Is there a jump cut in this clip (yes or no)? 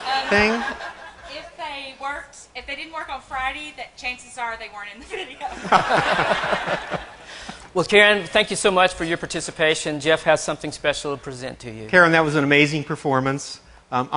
no